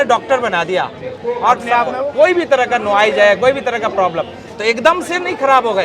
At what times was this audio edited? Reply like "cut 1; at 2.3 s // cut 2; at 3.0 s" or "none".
cut 1; at 1.9 s